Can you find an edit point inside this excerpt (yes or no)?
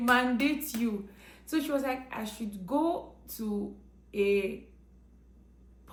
no